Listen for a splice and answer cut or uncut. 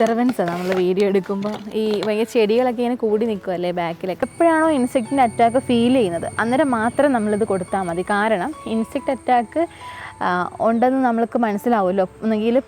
cut